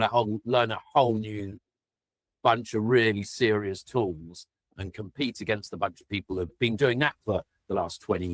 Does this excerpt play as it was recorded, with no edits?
yes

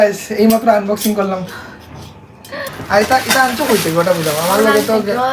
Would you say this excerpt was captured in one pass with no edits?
no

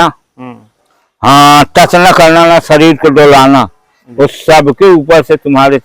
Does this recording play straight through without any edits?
yes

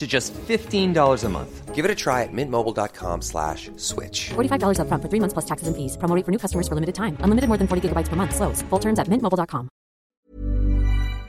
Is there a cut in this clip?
yes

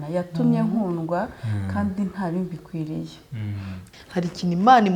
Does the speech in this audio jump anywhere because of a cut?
yes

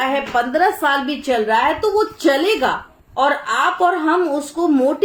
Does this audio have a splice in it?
no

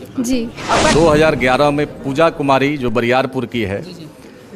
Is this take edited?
yes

